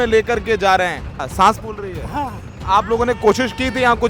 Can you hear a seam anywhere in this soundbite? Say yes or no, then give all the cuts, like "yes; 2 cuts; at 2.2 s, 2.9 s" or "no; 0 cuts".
yes; 2 cuts; at 1.1 s, 2.5 s